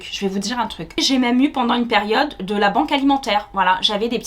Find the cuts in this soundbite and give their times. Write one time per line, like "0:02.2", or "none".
0:01.0